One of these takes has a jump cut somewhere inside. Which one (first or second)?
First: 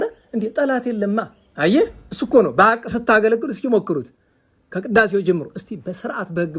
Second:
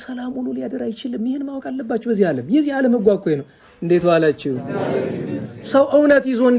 first